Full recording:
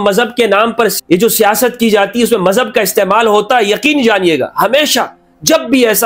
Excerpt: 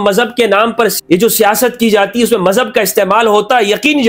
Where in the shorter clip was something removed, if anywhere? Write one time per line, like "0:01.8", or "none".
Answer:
none